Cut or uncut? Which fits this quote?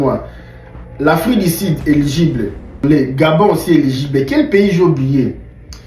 cut